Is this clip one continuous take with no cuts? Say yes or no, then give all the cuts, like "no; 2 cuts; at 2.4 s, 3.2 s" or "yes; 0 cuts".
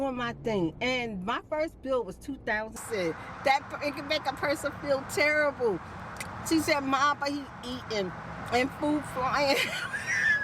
no; 1 cut; at 2.8 s